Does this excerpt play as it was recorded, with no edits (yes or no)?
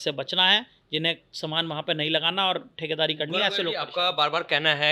yes